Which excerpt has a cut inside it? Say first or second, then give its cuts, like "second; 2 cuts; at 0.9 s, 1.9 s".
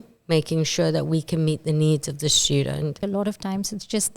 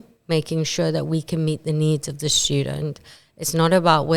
first; 1 cut; at 3.0 s